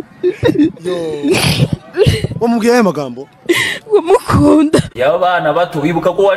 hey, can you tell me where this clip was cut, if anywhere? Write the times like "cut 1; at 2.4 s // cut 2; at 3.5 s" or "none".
cut 1; at 4.9 s